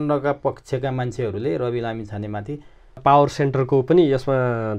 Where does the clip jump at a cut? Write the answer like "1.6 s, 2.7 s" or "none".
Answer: 3.0 s